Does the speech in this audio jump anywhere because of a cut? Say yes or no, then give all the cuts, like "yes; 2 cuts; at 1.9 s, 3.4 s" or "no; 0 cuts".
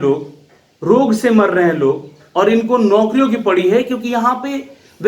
no; 0 cuts